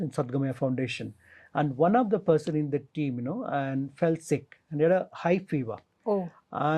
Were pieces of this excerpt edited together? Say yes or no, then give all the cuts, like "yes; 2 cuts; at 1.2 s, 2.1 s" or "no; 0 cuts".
no; 0 cuts